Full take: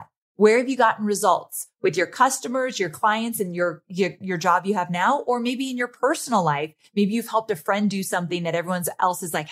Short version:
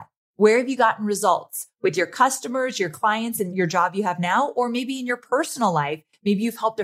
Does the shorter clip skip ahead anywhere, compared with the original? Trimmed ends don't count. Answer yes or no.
yes